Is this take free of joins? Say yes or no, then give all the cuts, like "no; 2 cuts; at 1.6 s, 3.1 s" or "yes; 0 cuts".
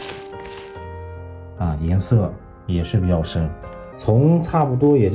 no; 1 cut; at 3.9 s